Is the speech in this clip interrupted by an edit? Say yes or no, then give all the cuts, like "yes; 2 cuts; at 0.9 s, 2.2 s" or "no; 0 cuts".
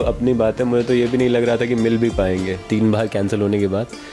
yes; 1 cut; at 2.6 s